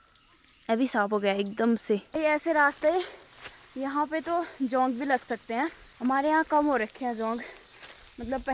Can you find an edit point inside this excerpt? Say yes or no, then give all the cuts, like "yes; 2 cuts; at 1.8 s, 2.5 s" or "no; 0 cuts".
yes; 2 cuts; at 2.1 s, 6.2 s